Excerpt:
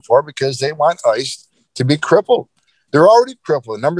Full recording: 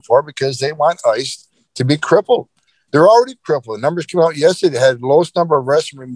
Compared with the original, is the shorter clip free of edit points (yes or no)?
yes